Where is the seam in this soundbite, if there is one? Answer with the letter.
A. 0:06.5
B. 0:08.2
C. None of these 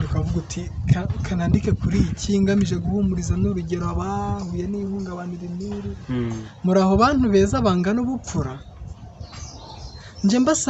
A